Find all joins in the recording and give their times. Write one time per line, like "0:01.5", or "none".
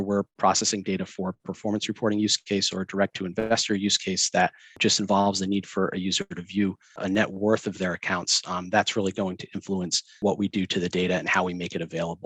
0:04.8
0:07.0
0:10.1

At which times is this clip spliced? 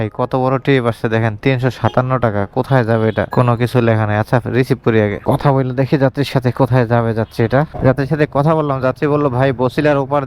none

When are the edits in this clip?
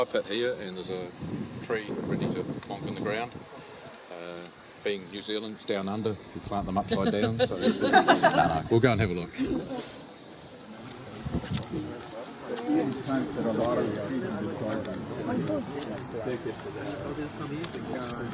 0:14.0

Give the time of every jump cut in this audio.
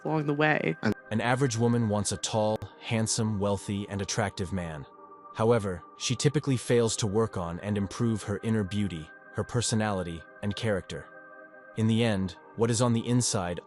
0:01.0

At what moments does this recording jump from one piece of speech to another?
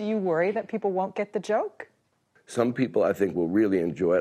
0:01.9

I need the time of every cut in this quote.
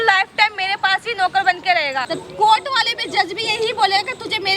0:02.0

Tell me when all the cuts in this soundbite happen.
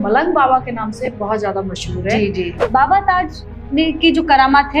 0:02.6

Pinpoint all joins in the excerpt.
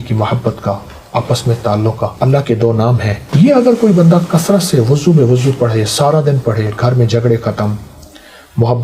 0:02.1
0:03.2

